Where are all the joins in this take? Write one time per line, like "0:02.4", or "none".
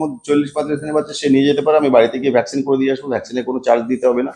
none